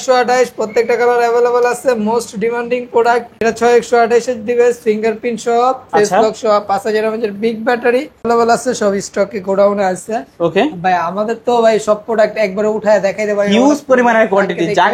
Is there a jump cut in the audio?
yes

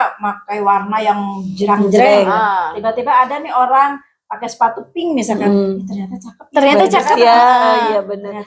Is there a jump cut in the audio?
no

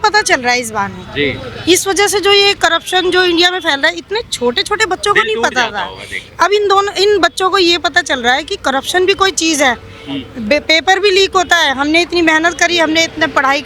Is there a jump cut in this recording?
no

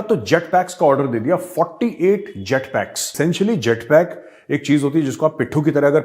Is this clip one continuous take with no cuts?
no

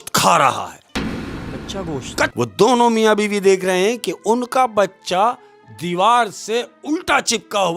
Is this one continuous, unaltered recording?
no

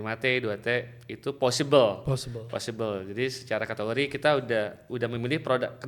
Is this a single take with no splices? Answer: yes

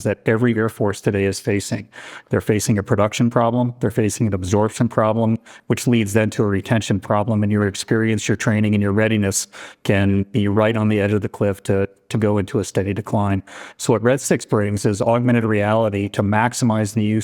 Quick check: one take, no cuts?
yes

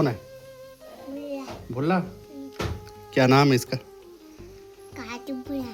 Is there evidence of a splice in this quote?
no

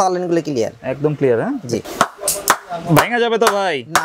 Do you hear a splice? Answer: yes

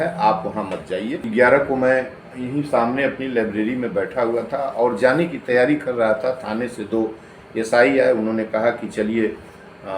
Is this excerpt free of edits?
no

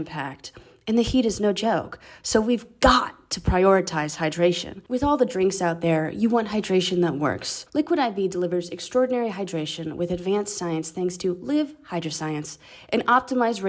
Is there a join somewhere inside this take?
no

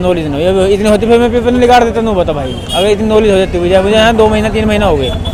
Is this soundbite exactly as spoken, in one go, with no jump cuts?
yes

